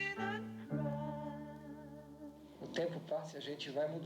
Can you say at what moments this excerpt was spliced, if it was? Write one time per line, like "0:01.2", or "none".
0:02.7